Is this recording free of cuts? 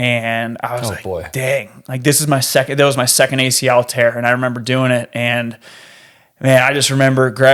yes; 0 cuts

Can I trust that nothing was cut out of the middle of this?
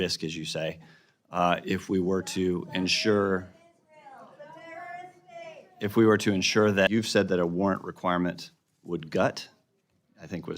no; 1 cut; at 6.9 s

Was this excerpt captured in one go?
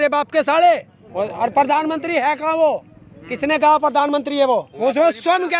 no; 2 cuts; at 1.0 s, 4.7 s

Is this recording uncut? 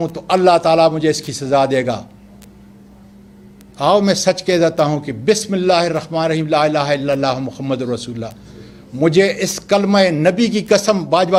yes; 0 cuts

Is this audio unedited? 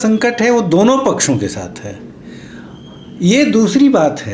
yes; 0 cuts

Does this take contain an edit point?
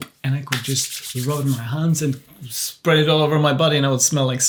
no; 0 cuts

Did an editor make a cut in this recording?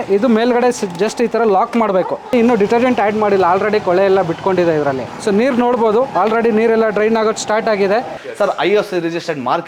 yes; 3 cuts; at 2.2 s, 5.0 s, 8.2 s

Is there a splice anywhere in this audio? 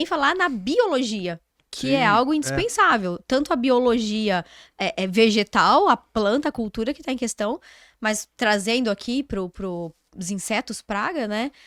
no; 0 cuts

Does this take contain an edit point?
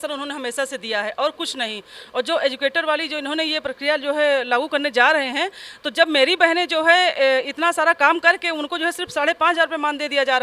no; 0 cuts

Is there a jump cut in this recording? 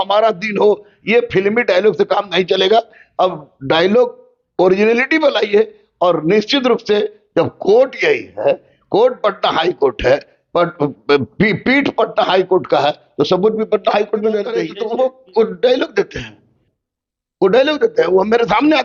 yes; 1 cut; at 14.7 s

